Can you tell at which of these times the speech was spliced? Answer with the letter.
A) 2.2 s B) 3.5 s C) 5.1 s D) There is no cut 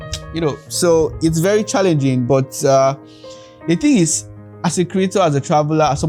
D